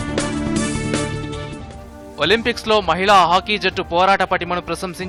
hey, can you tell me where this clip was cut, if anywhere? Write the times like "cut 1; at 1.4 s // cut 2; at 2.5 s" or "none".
none